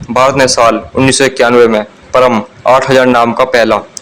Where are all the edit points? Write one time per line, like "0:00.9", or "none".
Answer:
none